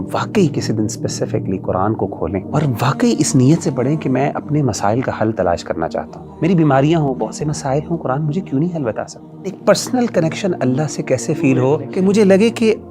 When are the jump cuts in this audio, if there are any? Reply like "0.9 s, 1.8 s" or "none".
2.5 s, 6.2 s, 9.6 s, 11.9 s